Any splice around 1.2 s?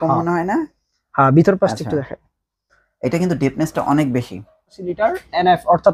no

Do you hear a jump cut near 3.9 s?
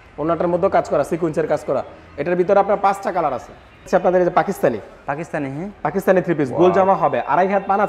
yes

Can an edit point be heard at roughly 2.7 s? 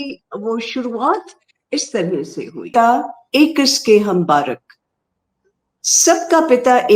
yes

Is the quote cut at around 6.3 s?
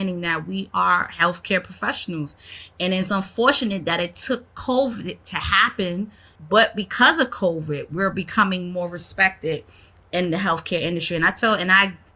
yes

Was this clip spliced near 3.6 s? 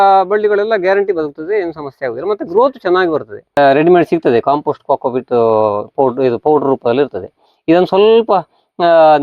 yes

